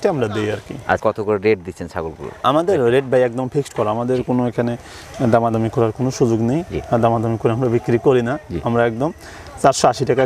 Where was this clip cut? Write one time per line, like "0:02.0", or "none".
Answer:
none